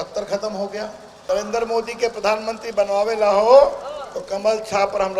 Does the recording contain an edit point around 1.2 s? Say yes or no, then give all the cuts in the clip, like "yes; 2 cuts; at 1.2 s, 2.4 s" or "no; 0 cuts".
yes; 1 cut; at 1.2 s